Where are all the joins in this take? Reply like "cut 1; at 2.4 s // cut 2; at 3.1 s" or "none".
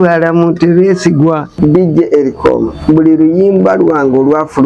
cut 1; at 1.5 s

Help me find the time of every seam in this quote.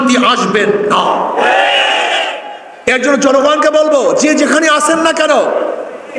none

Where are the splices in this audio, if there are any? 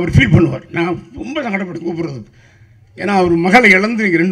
none

